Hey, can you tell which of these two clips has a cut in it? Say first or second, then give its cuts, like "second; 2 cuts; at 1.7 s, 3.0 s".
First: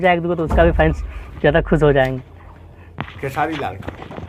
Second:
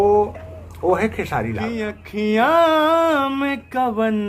second; 1 cut; at 2.0 s